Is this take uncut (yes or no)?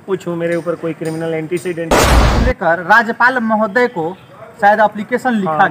no